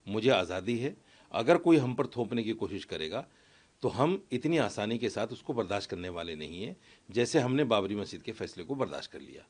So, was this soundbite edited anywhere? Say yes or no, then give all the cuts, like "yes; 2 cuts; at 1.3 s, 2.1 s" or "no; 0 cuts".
no; 0 cuts